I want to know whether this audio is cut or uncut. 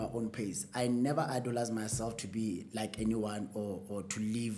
uncut